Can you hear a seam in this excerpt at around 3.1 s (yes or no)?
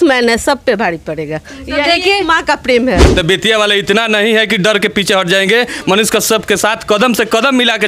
yes